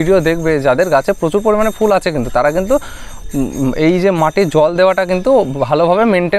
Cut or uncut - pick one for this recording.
uncut